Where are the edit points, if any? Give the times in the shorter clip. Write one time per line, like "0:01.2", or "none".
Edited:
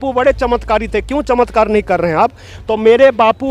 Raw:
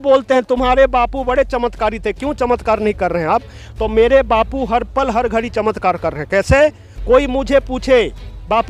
none